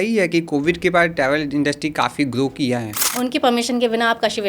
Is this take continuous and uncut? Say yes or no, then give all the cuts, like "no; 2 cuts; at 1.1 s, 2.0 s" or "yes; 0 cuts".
no; 1 cut; at 3.0 s